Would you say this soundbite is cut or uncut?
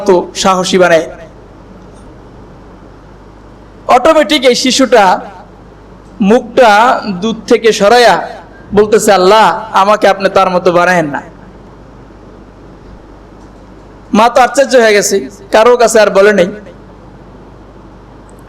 uncut